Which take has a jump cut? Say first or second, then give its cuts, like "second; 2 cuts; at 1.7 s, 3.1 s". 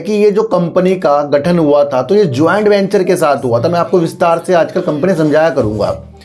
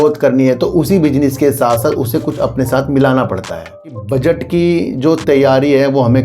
second; 1 cut; at 4.0 s